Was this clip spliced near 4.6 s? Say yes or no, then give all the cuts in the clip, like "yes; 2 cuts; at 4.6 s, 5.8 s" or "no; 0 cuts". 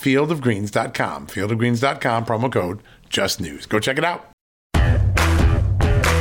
yes; 1 cut; at 4.6 s